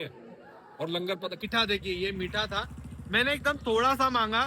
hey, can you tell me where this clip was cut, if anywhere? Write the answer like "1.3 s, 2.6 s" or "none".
1.4 s